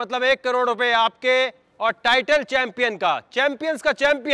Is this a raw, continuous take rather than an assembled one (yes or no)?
yes